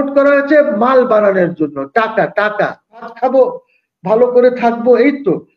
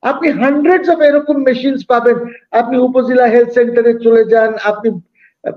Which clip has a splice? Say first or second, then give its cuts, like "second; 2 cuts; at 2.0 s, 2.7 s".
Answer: first; 1 cut; at 3.1 s